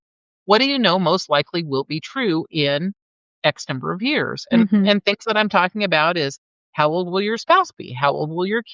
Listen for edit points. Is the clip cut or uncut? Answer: uncut